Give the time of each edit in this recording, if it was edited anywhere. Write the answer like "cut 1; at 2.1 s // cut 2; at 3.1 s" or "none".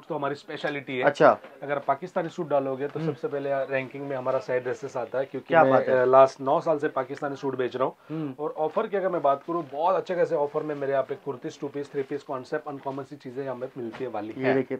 none